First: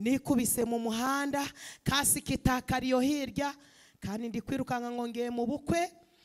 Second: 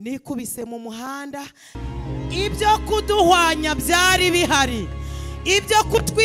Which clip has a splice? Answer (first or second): second